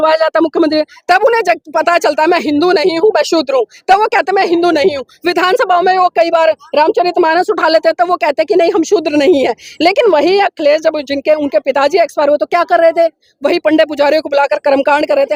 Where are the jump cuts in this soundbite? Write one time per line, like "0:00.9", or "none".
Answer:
none